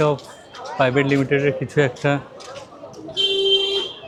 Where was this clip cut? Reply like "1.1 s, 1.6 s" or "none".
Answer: none